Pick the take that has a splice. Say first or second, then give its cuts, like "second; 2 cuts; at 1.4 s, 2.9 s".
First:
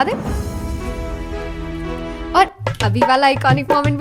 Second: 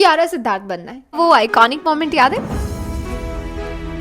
second; 1 cut; at 1.2 s